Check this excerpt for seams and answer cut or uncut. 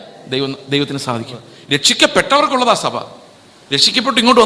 cut